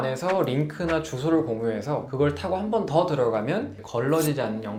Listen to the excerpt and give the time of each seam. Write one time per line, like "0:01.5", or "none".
none